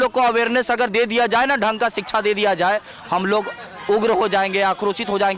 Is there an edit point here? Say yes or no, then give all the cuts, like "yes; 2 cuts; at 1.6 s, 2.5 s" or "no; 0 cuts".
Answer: no; 0 cuts